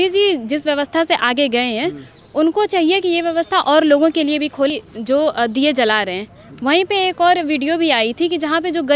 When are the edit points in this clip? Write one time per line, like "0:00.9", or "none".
0:04.7